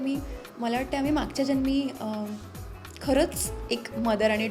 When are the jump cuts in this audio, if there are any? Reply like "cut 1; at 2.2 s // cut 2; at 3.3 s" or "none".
none